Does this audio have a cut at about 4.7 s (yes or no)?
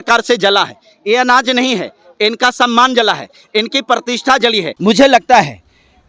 yes